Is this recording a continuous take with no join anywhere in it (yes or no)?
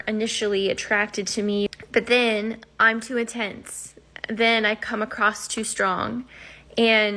no